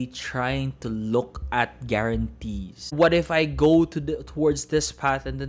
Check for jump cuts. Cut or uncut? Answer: cut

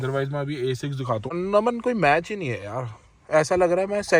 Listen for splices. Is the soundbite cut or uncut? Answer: cut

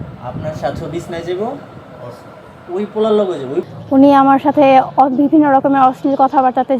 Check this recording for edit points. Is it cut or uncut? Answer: cut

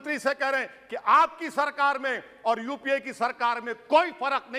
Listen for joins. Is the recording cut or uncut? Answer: uncut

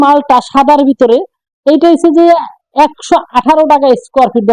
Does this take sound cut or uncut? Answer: uncut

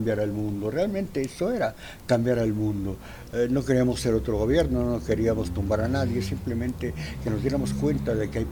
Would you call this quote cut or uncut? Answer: uncut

